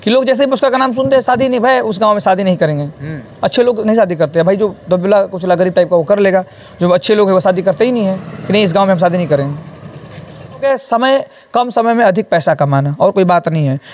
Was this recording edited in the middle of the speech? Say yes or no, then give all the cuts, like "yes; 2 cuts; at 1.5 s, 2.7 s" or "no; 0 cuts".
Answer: yes; 1 cut; at 10.6 s